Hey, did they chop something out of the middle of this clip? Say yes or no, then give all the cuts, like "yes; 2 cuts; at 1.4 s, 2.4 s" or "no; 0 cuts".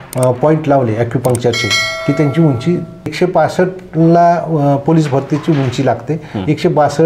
yes; 1 cut; at 3.1 s